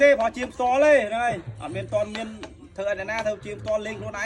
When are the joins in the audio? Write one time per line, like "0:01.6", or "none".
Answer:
none